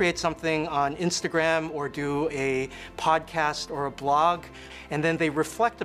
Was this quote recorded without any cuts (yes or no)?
yes